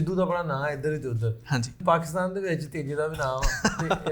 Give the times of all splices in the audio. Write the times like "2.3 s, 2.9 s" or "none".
1.8 s